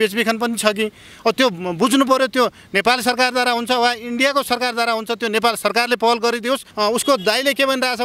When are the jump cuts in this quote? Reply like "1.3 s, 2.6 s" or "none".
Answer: 6.7 s

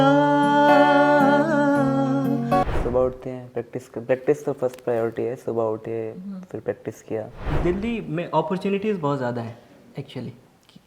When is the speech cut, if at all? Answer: 2.6 s, 7.4 s

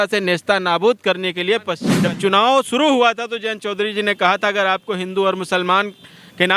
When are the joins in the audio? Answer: 1.8 s

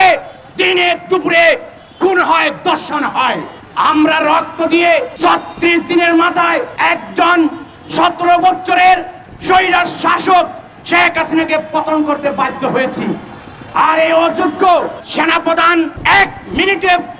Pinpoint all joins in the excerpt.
3.6 s, 5.1 s, 6.7 s, 15.0 s, 16.0 s

